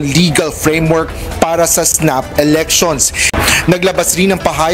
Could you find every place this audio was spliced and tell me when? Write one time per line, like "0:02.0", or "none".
0:03.3